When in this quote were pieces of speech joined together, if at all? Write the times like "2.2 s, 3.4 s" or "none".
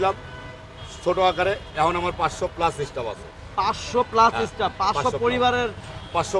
none